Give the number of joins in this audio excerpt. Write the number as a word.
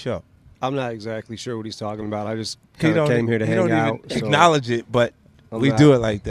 zero